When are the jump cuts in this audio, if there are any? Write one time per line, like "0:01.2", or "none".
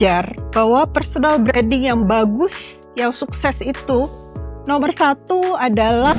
none